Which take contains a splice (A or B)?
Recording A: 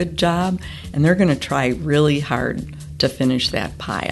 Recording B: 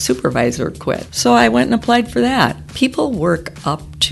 B